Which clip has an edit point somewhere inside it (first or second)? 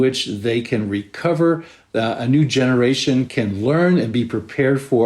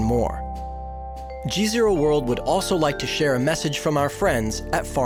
first